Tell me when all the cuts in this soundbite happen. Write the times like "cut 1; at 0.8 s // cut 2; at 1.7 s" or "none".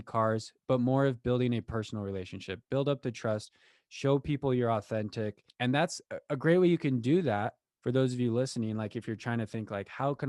cut 1; at 5.4 s